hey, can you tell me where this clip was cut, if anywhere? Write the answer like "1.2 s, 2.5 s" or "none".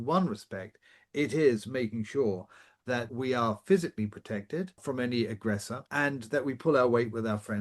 3.1 s, 4.8 s, 5.8 s